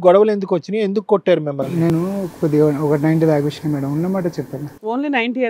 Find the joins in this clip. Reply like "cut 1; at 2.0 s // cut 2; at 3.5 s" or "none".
none